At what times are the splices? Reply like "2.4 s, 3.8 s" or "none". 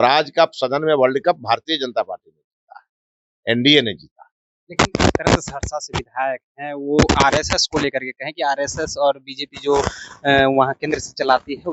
none